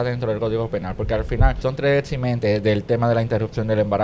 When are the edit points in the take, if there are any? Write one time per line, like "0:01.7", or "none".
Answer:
0:01.6